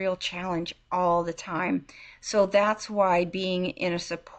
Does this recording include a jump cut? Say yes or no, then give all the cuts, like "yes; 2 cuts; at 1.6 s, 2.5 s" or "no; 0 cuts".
no; 0 cuts